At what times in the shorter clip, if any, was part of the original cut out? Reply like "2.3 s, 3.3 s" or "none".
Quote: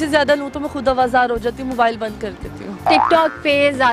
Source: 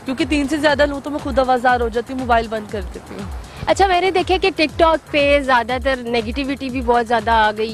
2.9 s